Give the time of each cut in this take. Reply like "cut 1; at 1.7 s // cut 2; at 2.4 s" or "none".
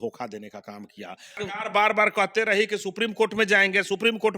cut 1; at 1.3 s